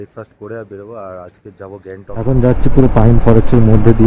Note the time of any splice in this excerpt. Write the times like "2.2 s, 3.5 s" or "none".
2.2 s